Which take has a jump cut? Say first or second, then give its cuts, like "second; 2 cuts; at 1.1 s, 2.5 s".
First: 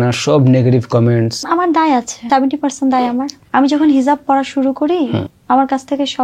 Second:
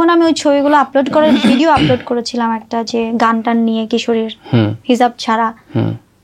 first; 4 cuts; at 1.4 s, 2.2 s, 3.3 s, 5.3 s